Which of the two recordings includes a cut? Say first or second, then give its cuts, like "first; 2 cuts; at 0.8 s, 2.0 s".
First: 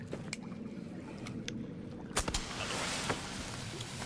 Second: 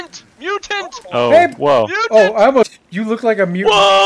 second; 1 cut; at 2.7 s